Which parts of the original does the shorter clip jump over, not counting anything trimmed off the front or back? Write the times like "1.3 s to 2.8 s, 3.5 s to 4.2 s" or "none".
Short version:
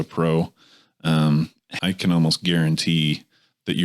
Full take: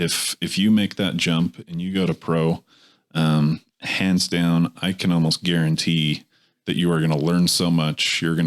3.9 s to 4.8 s